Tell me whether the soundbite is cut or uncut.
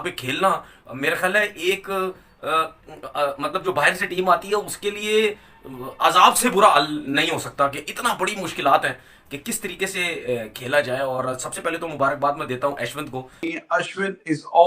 cut